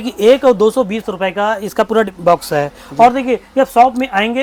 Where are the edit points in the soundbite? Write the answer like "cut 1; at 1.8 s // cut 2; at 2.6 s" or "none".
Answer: none